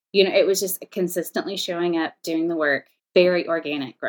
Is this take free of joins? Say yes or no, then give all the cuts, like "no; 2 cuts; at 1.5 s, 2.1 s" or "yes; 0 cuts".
no; 1 cut; at 2.9 s